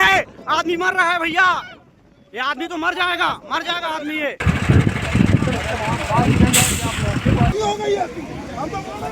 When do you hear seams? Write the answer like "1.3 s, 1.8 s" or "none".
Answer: none